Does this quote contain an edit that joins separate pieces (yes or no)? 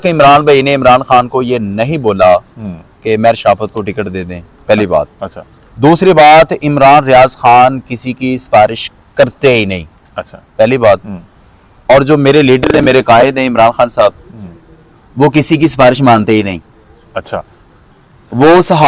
no